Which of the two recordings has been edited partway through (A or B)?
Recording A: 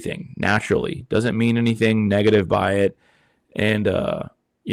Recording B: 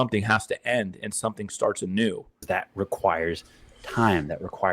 B